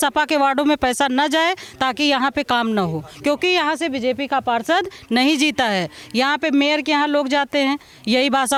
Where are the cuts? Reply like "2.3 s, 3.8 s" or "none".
none